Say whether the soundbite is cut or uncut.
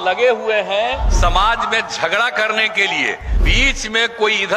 cut